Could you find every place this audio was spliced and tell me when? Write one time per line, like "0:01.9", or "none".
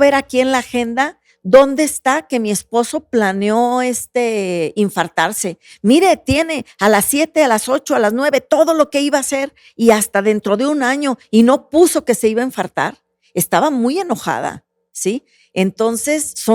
none

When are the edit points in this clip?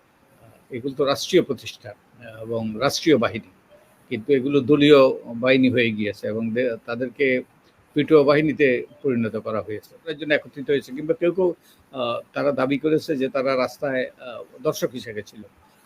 0:10.2

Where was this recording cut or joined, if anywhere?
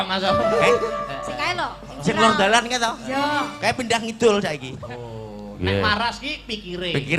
0:04.7

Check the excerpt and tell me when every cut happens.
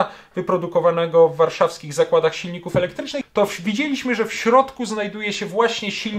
0:03.2

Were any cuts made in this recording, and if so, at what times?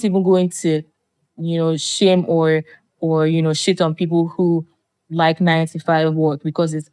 none

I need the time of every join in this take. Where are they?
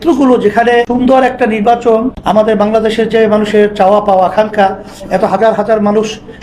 0:00.9
0:02.1

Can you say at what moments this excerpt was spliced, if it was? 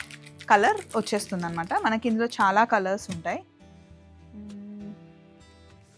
none

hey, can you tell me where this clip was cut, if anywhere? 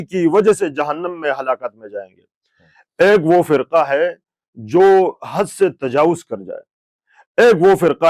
none

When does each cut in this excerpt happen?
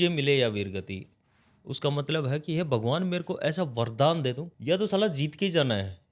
0:04.5

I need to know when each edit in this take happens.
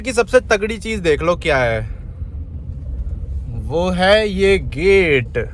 none

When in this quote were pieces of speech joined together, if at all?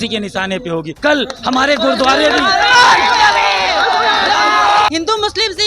0:00.9
0:04.9

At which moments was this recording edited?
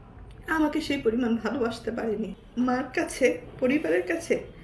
0:02.4

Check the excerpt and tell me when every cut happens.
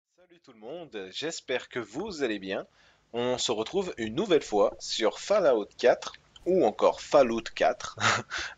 none

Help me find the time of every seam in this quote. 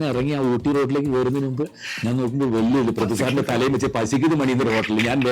none

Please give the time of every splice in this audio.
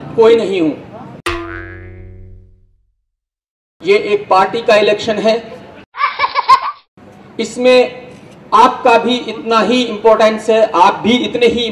none

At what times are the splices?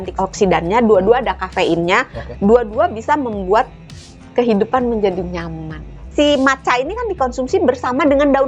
0:05.9

